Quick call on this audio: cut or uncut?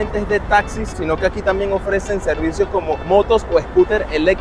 cut